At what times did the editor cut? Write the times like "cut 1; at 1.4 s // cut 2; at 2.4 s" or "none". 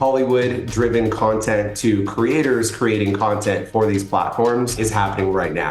cut 1; at 4.8 s